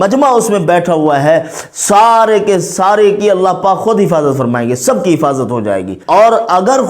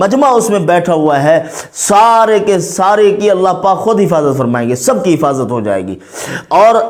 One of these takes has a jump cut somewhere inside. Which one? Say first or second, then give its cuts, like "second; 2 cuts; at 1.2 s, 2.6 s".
first; 1 cut; at 5.9 s